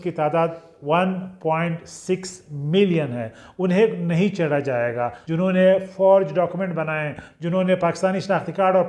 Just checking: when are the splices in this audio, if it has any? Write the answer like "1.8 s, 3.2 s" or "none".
5.2 s